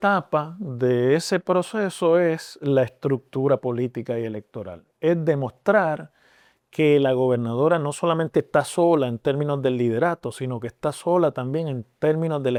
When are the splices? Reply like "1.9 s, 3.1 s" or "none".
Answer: none